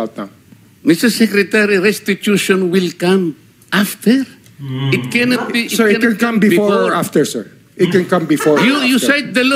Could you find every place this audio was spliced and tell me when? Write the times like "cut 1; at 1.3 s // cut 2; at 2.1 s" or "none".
none

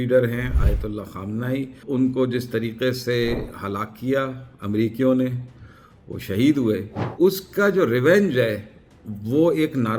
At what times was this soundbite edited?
cut 1; at 1.8 s // cut 2; at 7.0 s

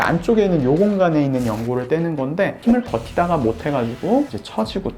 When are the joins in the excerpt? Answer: cut 1; at 2.6 s

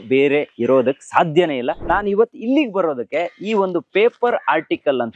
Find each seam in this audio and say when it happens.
cut 1; at 1.8 s

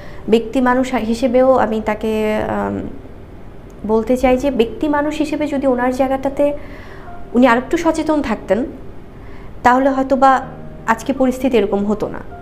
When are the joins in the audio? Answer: none

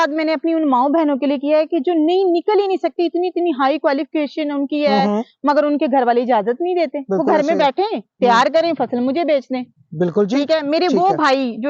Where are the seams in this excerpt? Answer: none

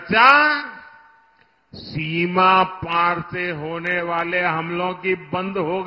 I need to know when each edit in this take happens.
none

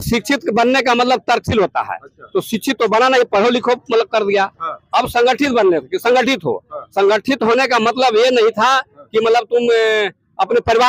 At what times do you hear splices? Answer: none

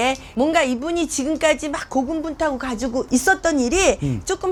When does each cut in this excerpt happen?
none

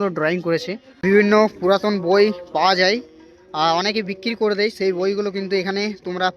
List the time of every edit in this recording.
cut 1; at 1.0 s

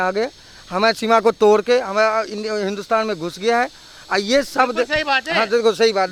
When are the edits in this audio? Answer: none

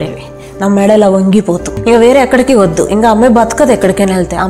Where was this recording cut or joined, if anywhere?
cut 1; at 1.7 s

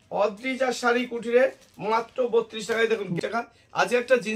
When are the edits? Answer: cut 1; at 3.1 s

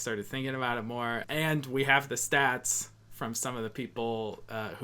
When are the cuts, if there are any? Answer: cut 1; at 1.2 s

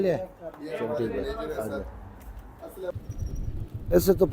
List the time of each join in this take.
cut 1; at 3.0 s

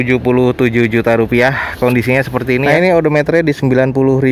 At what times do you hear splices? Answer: cut 1; at 2.6 s

